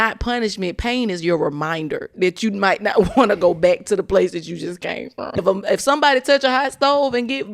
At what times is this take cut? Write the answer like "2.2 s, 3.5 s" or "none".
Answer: 5.4 s